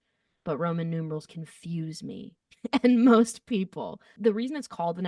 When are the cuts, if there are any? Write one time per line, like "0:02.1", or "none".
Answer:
0:04.1